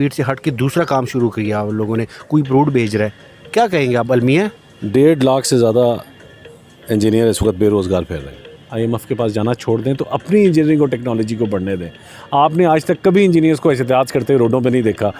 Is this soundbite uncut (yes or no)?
no